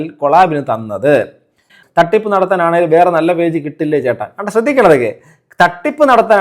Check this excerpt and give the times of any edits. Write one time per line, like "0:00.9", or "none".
0:01.8